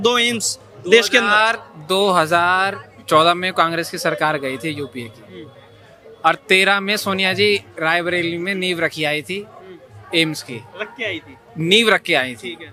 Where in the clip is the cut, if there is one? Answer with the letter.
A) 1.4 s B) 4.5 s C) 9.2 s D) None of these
D